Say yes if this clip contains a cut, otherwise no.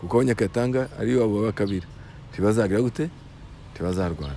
no